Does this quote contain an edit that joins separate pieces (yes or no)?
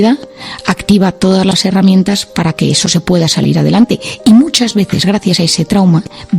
no